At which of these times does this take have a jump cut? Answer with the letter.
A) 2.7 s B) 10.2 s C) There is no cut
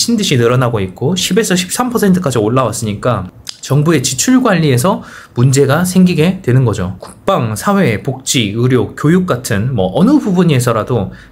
C